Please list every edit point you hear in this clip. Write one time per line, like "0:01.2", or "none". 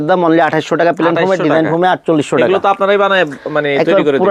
none